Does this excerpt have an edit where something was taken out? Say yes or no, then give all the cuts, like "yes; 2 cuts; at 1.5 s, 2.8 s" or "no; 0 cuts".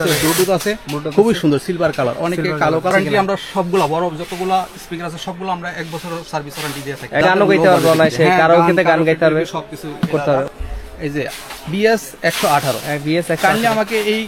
yes; 3 cuts; at 2.9 s, 7.2 s, 10.5 s